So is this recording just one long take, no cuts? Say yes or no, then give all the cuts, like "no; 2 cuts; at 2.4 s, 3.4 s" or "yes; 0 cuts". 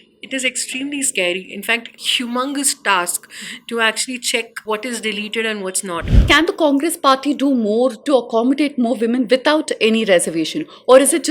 no; 3 cuts; at 2.0 s, 4.5 s, 6.2 s